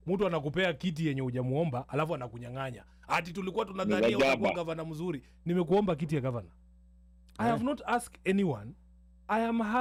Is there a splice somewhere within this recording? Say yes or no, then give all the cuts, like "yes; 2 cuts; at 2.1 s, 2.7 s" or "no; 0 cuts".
no; 0 cuts